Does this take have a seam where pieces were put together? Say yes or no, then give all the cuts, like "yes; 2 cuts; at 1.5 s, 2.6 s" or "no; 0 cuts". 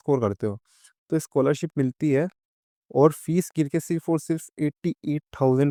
no; 0 cuts